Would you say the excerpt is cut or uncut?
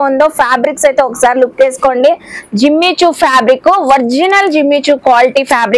cut